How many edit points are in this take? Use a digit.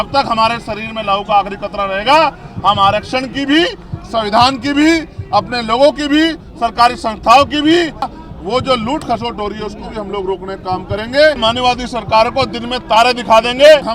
2